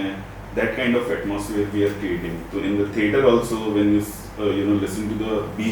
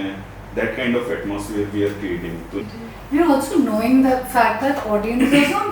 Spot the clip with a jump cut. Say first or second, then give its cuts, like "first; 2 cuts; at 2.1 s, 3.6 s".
second; 1 cut; at 2.6 s